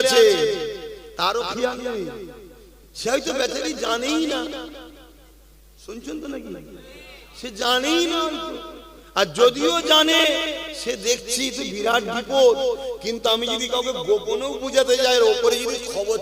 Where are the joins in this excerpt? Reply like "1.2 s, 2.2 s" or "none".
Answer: none